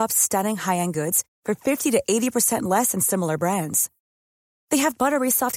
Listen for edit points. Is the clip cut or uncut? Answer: uncut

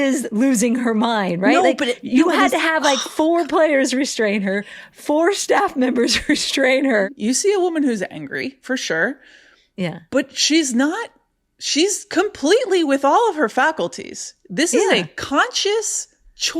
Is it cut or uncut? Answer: cut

